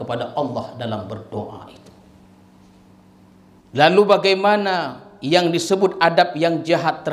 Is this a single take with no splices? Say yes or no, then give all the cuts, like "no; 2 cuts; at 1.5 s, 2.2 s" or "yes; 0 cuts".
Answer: no; 1 cut; at 3.6 s